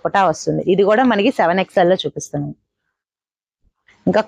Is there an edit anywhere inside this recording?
no; 0 cuts

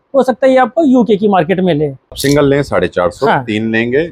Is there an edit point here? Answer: yes; 1 cut; at 2.1 s

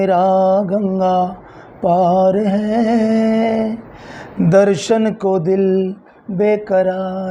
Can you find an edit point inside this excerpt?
no; 0 cuts

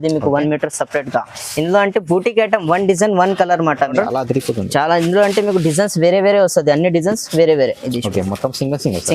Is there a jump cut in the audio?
yes; 1 cut; at 3.9 s

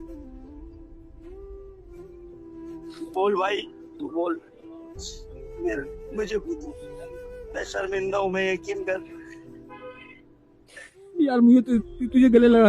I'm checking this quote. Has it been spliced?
no; 0 cuts

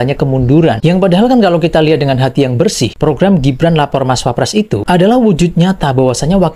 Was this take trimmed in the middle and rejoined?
no; 0 cuts

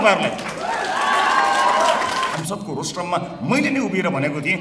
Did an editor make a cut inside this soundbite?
yes; 1 cut; at 2.4 s

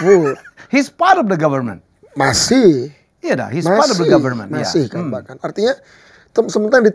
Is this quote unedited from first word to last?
yes; 0 cuts

